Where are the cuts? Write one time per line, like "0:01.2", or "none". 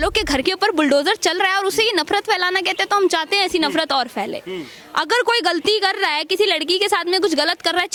none

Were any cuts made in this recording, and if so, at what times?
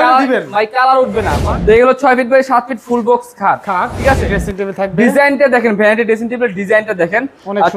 0:01.5
0:04.3

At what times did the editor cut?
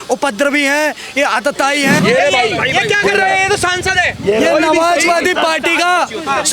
0:02.0

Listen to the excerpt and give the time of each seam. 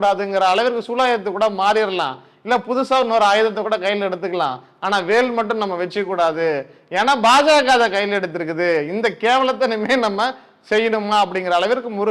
none

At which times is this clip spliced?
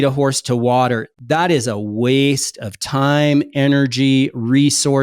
none

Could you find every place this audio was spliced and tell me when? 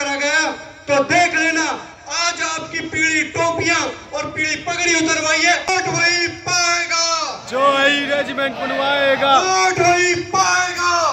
0:05.7

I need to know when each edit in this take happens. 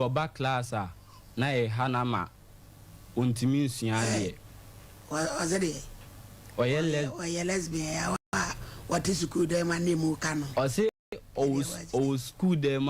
none

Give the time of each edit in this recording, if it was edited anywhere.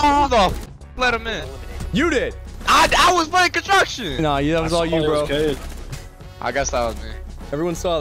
0:02.5

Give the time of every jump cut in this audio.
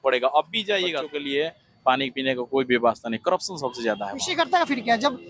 0:01.1
0:04.2

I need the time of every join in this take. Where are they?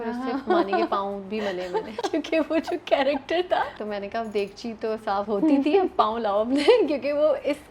0:01.9
0:03.8
0:05.3

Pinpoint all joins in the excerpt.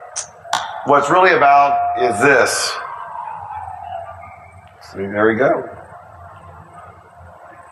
0:04.6

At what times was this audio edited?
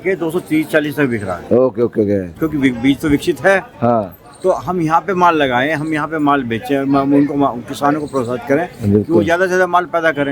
0:02.3

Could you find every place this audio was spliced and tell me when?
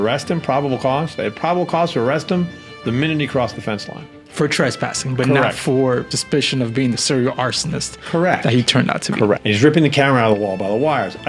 0:06.1
0:09.4

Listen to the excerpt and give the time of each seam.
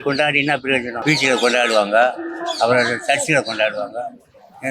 0:00.9

